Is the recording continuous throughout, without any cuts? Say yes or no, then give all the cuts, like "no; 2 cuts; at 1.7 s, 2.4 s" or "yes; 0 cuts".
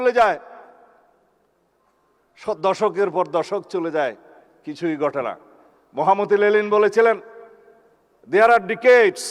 yes; 0 cuts